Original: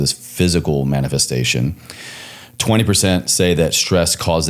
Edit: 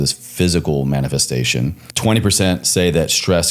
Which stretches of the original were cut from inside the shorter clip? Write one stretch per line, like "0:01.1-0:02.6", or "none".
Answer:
0:01.8-0:02.5